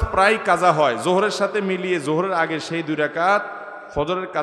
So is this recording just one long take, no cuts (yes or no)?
yes